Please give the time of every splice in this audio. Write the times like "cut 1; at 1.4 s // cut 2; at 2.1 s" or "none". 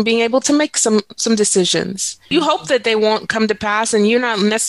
cut 1; at 2.2 s